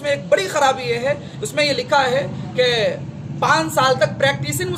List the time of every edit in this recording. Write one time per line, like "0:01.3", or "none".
none